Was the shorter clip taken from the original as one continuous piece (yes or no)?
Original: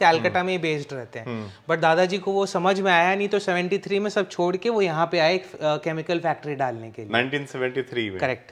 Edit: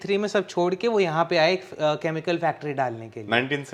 yes